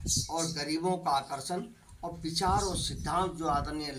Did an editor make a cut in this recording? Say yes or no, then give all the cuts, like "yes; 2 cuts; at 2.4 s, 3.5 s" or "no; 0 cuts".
no; 0 cuts